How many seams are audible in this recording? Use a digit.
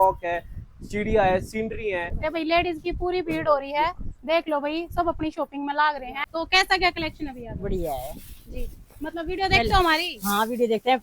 2